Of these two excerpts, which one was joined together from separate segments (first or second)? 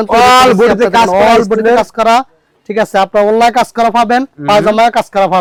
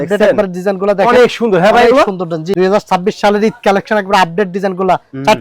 second